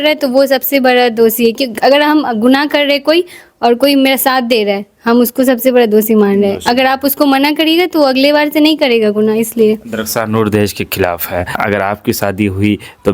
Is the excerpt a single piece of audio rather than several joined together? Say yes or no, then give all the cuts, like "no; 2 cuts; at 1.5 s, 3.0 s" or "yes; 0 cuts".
yes; 0 cuts